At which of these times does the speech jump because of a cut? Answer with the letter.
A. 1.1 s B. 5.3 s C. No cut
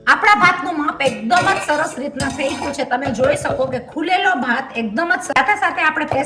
B